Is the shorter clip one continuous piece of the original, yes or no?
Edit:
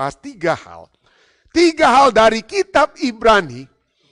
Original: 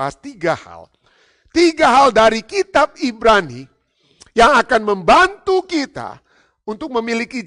yes